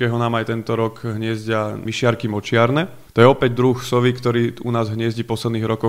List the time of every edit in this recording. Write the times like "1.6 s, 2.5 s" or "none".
1.9 s, 3.0 s